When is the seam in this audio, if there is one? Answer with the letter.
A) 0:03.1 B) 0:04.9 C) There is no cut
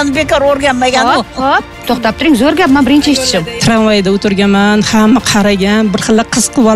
A